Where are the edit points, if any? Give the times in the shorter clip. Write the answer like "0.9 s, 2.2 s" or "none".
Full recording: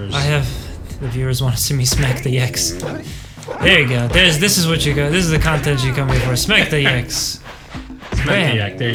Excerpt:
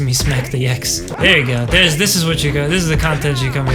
1.1 s